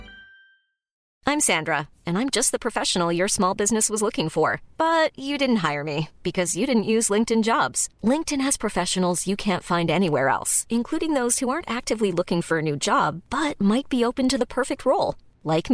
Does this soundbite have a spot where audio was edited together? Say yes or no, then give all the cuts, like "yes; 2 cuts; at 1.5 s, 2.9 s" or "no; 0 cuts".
yes; 1 cut; at 1.0 s